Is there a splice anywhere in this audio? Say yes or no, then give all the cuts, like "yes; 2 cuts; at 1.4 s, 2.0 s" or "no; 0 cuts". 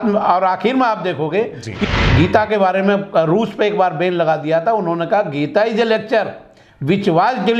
yes; 1 cut; at 1.7 s